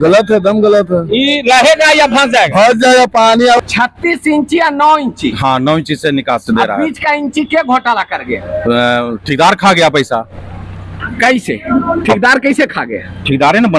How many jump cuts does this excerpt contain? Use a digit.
1